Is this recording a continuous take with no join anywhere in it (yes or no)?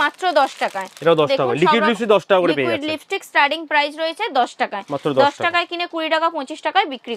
yes